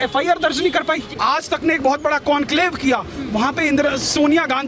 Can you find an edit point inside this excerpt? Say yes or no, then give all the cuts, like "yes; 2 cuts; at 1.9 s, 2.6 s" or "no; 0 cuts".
yes; 1 cut; at 1.1 s